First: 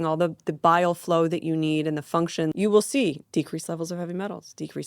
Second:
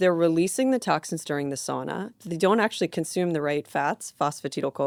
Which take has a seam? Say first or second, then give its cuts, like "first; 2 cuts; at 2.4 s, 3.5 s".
first; 2 cuts; at 2.5 s, 3.2 s